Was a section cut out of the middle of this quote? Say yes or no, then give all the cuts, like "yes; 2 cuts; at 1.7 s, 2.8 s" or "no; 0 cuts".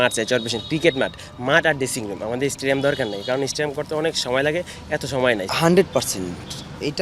no; 0 cuts